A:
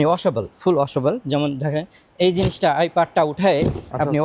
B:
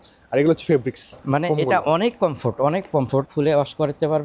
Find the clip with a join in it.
B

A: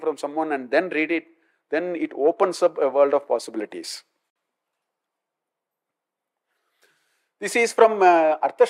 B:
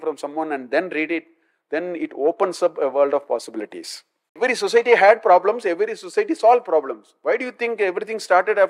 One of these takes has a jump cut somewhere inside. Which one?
B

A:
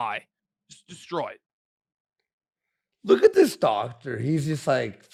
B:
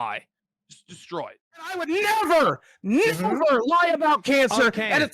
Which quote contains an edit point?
B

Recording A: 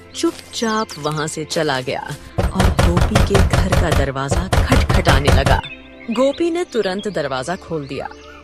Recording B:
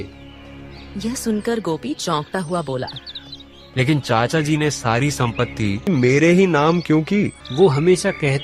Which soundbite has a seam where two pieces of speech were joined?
B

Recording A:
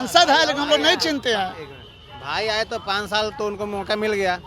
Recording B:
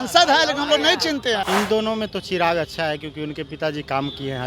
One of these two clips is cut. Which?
B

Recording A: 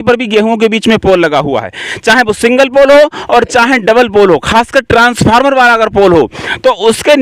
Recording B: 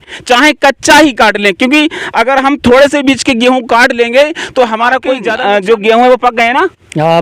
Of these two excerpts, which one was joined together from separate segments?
B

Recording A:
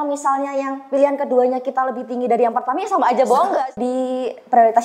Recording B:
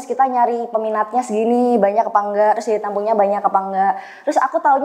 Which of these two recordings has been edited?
A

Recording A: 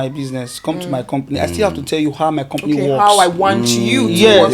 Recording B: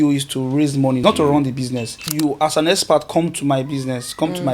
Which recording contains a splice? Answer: B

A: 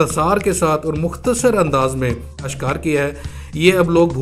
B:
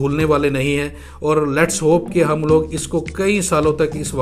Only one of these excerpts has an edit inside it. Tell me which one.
A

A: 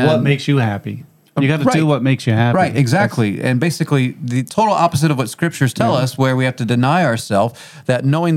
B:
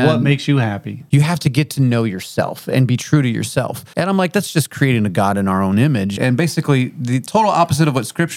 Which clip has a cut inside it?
B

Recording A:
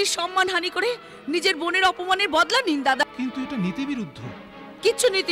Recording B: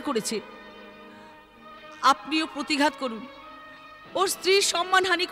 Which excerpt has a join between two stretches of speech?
A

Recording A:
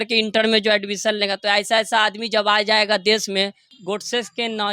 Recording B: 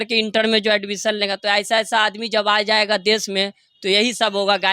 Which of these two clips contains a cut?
A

